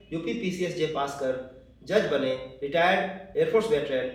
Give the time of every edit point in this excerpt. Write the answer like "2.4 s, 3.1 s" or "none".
none